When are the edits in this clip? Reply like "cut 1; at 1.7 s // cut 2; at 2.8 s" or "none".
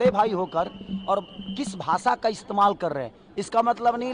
none